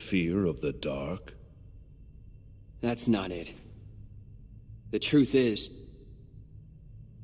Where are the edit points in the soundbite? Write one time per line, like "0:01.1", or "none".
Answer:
none